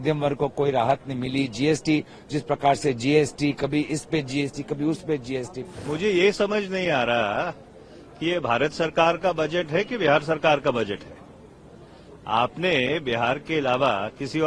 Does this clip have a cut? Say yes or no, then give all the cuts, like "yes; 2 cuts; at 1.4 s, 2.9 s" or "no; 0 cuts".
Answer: yes; 1 cut; at 5.7 s